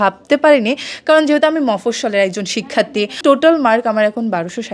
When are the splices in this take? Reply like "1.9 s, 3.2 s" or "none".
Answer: 3.2 s